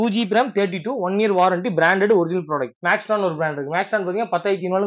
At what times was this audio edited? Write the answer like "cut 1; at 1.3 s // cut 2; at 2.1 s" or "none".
cut 1; at 2.7 s